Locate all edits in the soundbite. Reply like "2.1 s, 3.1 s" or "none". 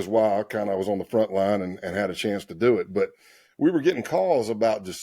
none